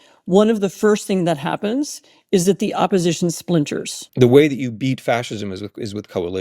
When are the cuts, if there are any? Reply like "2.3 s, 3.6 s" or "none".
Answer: 4.0 s